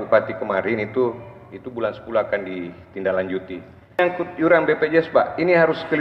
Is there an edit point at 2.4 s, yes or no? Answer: no